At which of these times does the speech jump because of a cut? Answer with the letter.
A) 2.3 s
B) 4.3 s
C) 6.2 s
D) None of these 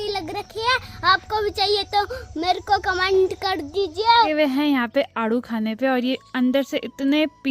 B